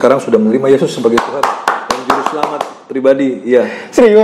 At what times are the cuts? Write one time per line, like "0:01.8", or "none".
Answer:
0:01.1